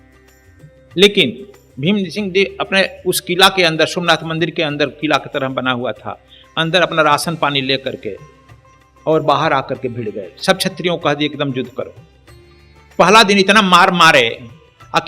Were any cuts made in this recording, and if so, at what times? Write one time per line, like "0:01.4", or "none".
0:00.9